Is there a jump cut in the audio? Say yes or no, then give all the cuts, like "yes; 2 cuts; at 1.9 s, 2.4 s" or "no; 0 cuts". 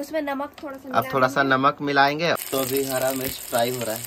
yes; 1 cut; at 2.4 s